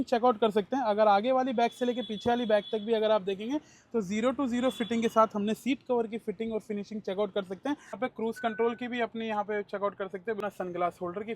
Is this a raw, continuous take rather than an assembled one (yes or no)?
no